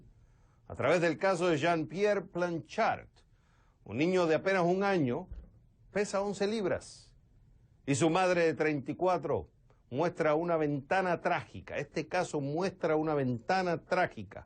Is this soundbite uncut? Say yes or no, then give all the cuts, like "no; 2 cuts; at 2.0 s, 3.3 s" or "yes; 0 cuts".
no; 1 cut; at 11.9 s